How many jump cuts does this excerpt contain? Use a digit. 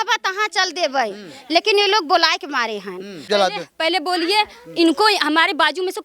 1